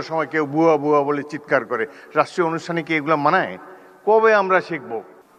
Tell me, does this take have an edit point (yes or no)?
no